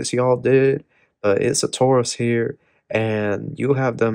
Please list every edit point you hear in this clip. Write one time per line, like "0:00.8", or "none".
none